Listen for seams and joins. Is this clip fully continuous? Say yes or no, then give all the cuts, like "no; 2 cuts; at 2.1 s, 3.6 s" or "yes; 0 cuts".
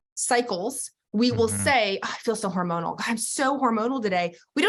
yes; 0 cuts